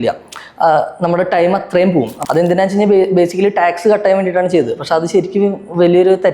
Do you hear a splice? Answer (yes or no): yes